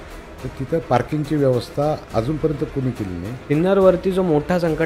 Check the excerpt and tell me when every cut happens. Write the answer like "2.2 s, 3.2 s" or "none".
2.0 s, 3.3 s